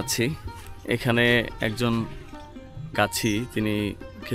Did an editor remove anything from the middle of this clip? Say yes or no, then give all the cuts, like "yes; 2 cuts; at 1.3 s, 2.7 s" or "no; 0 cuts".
no; 0 cuts